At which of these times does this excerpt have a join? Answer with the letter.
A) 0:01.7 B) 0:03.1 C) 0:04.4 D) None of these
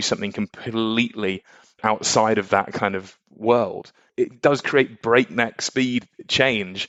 D